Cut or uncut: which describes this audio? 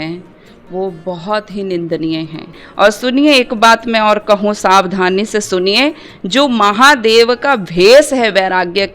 cut